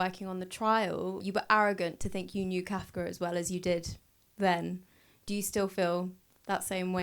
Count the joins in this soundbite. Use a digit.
1